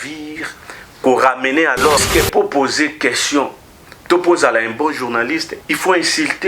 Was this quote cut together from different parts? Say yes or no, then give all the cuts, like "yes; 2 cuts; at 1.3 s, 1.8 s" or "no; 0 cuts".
yes; 2 cuts; at 2.0 s, 5.5 s